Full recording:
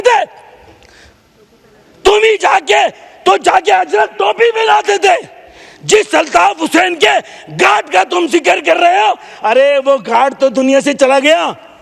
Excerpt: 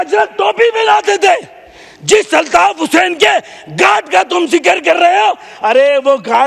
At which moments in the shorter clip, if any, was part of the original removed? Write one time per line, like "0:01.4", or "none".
none